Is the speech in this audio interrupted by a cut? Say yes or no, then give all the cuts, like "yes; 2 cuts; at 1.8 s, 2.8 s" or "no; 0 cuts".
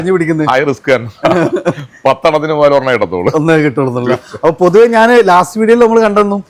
no; 0 cuts